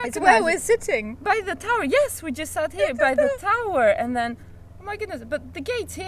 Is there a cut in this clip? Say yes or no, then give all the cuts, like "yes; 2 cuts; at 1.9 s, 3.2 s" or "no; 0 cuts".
no; 0 cuts